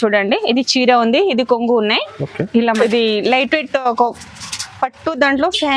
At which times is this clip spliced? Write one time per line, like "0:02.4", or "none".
0:02.7